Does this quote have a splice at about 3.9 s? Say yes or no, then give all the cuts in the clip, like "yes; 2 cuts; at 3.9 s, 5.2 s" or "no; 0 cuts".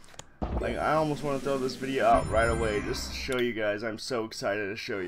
no; 1 cut; at 1.6 s